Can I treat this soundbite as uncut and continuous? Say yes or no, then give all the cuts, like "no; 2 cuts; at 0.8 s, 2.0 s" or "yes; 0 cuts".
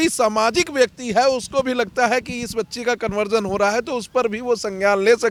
yes; 0 cuts